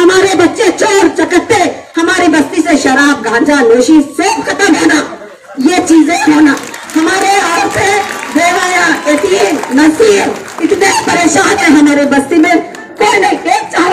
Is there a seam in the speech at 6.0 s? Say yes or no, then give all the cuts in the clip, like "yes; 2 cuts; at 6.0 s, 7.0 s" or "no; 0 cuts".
no; 0 cuts